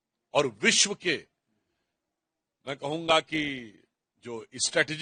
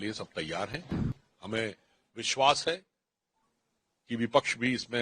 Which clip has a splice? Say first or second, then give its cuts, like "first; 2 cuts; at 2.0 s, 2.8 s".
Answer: second; 1 cut; at 1.1 s